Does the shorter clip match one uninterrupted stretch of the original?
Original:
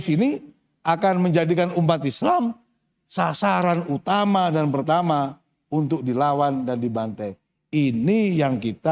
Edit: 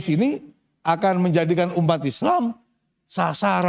yes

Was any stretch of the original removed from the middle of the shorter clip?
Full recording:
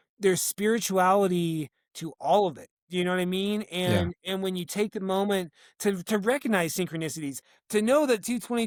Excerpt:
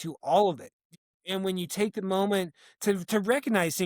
yes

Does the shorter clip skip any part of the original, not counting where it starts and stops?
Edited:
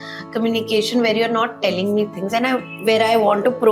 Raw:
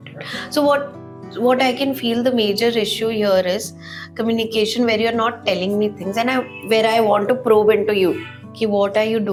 no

